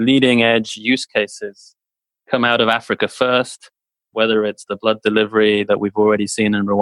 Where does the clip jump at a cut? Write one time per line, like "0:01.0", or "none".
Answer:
none